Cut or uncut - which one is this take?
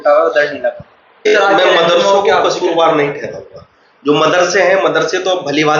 cut